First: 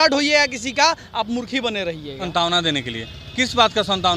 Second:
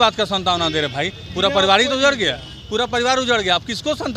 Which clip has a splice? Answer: first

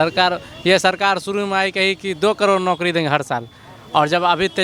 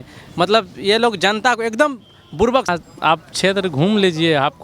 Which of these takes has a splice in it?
second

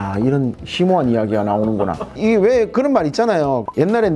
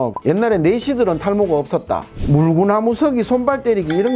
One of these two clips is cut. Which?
second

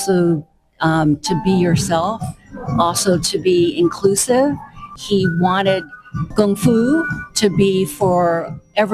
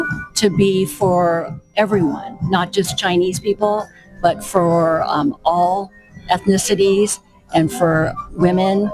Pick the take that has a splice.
first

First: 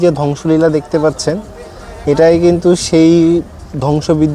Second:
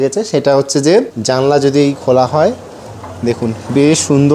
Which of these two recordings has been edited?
second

